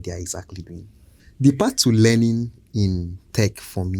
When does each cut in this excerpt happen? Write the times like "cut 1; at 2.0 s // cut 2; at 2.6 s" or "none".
cut 1; at 1.3 s